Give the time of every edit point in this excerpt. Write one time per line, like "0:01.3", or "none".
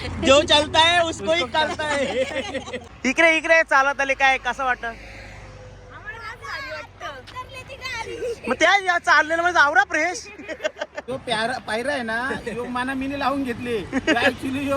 0:02.8
0:11.0